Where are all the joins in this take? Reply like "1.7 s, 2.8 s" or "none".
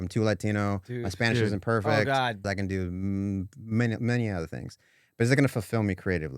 2.4 s